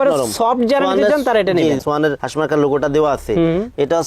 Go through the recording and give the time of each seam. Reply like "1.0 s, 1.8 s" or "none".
1.8 s